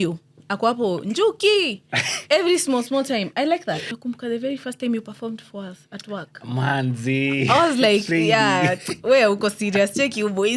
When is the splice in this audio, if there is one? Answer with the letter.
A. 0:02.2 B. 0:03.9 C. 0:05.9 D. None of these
B